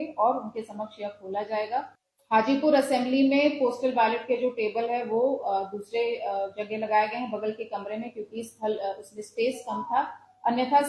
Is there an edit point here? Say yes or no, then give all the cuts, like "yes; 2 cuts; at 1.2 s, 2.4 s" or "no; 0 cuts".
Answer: yes; 1 cut; at 2.0 s